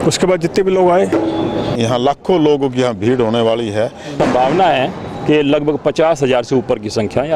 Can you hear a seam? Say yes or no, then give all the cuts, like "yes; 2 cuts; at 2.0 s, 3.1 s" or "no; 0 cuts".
yes; 2 cuts; at 1.7 s, 4.1 s